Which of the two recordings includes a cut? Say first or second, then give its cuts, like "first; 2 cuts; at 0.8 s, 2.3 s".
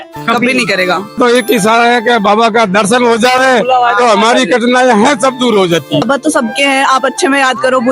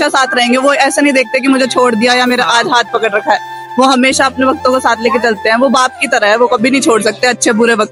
first; 2 cuts; at 1.2 s, 6.0 s